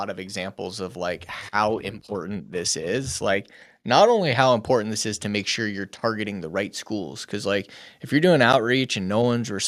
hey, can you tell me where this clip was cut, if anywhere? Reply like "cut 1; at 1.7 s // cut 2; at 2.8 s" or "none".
none